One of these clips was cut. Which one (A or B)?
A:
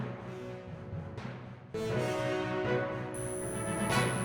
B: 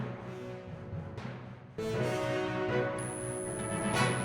B